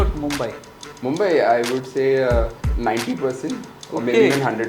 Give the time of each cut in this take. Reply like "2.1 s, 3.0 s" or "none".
none